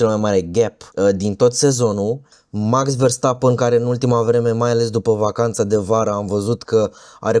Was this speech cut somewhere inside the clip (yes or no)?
yes